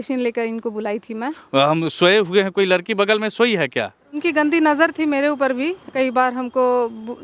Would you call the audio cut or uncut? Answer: cut